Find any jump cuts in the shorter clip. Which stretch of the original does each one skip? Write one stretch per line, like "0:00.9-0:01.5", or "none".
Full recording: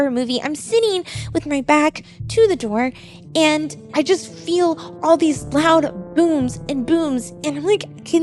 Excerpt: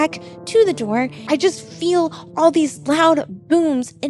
0:03.0-0:03.8